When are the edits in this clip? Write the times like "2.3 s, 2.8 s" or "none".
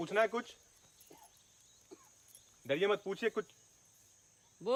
none